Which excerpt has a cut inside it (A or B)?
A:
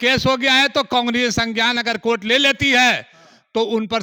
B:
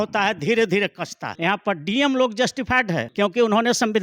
B